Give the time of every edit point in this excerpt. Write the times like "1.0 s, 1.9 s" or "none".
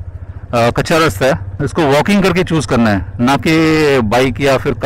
1.6 s